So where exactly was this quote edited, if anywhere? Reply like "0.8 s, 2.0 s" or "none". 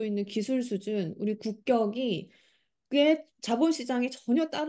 none